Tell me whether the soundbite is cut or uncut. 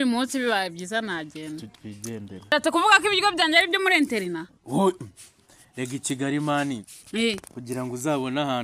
cut